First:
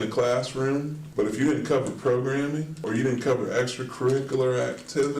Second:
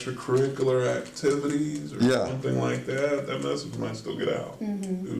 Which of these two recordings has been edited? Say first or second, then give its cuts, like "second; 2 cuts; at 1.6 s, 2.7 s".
first; 2 cuts; at 1.0 s, 2.8 s